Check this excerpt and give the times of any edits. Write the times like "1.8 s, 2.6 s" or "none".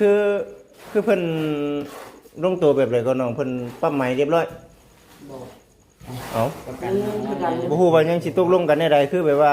7.7 s